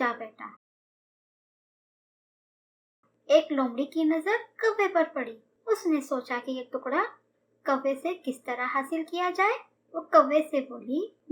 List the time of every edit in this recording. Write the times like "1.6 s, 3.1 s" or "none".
none